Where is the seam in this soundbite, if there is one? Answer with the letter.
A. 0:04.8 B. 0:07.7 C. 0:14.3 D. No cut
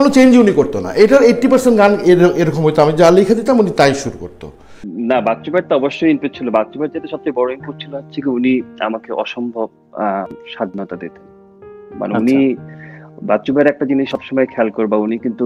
A